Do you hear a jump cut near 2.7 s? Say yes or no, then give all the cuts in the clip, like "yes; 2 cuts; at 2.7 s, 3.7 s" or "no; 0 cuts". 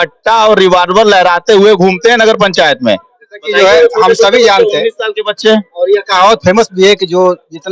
no; 0 cuts